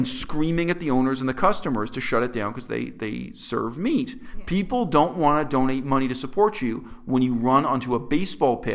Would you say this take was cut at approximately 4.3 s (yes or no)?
yes